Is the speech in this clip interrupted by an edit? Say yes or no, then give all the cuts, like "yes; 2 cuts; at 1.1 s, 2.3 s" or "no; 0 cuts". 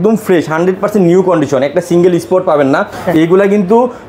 no; 0 cuts